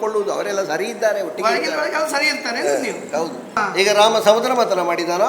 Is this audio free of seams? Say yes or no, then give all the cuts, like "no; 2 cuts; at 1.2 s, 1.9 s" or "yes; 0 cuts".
no; 1 cut; at 3.6 s